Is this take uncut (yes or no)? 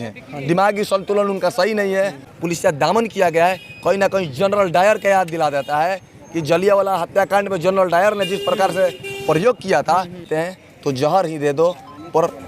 no